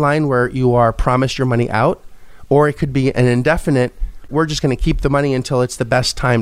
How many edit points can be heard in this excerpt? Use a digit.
0